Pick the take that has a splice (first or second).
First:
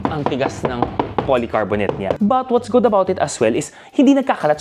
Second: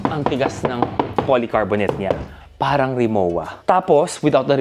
first